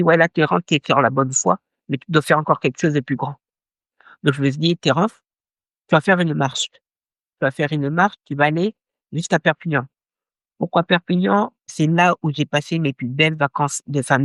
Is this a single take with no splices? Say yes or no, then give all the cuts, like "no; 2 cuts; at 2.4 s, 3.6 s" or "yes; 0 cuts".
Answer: yes; 0 cuts